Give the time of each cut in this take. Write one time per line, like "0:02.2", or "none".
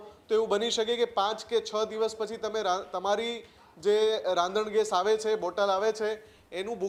none